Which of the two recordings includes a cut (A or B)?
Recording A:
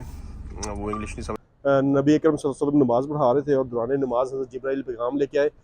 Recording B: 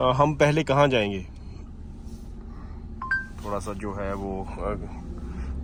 A